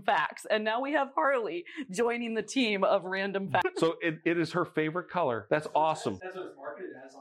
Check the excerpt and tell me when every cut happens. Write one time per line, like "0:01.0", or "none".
0:03.6
0:05.4
0:06.2